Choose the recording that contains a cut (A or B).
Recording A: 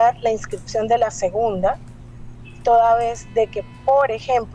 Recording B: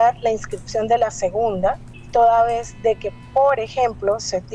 B